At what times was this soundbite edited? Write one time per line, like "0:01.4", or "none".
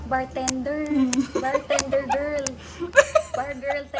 none